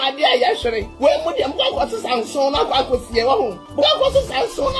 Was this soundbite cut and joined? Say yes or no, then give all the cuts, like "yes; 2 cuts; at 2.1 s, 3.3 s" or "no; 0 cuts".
yes; 2 cuts; at 0.9 s, 3.6 s